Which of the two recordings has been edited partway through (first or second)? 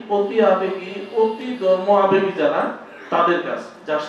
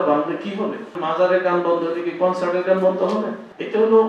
second